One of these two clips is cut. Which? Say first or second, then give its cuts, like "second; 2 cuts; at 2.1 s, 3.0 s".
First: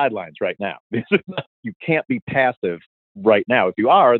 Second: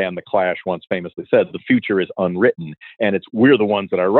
first; 2 cuts; at 1.6 s, 3.0 s